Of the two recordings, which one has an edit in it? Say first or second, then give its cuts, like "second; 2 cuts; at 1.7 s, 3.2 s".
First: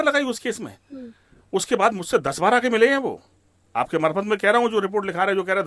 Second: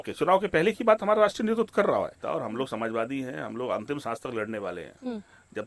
second; 1 cut; at 2.2 s